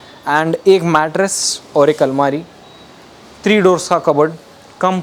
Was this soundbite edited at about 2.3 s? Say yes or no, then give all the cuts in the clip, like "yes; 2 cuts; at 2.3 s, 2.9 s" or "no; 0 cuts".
no; 0 cuts